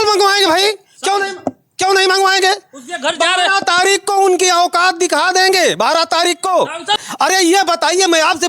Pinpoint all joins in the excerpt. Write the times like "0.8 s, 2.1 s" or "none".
7.1 s

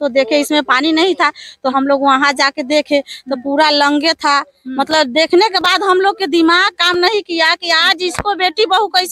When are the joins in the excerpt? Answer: none

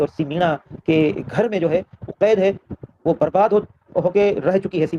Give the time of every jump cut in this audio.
none

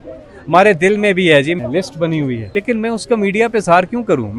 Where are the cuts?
1.6 s, 2.5 s

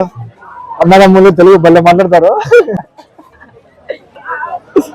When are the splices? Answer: 2.8 s

